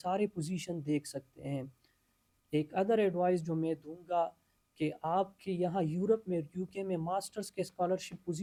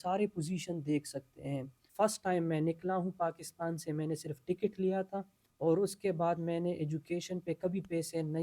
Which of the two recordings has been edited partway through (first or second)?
second